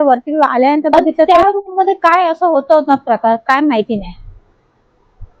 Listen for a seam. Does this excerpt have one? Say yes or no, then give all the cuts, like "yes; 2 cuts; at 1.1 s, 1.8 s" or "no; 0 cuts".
yes; 1 cut; at 1.1 s